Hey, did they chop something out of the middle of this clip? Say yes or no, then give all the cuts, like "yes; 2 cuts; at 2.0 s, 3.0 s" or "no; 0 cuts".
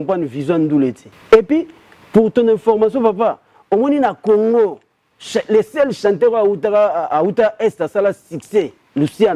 yes; 1 cut; at 1.1 s